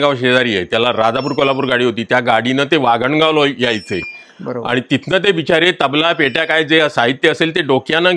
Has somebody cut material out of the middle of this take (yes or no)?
no